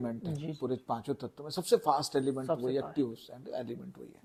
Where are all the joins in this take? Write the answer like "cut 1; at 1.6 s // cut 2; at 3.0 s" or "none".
none